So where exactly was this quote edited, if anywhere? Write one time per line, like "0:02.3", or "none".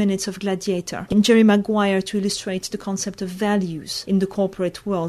0:00.9
0:03.9